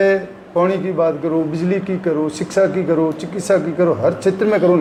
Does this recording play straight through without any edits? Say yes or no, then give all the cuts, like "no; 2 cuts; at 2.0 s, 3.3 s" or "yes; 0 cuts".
yes; 0 cuts